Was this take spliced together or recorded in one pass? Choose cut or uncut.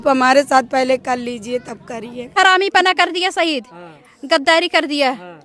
cut